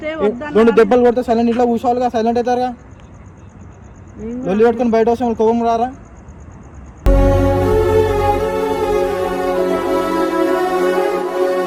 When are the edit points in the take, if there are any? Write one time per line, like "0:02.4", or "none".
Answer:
none